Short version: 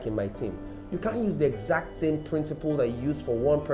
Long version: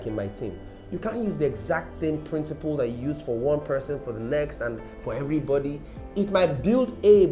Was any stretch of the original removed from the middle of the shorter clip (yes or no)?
no